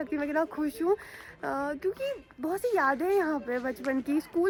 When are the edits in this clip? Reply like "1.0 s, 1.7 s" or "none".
none

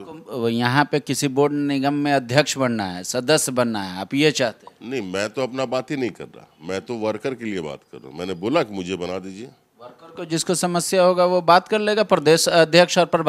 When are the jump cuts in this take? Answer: none

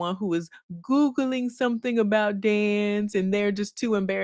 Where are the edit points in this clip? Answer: none

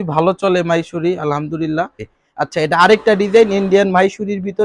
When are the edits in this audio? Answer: 2.1 s

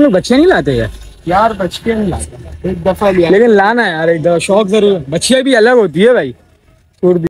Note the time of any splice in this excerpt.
none

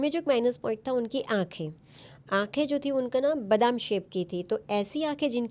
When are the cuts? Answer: none

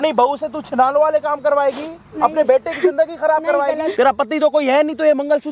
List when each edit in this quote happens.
3.9 s

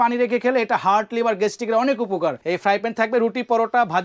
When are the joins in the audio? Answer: 2.4 s

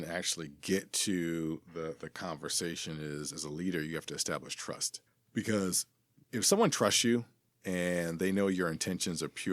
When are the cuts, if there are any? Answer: 4.9 s, 6.2 s

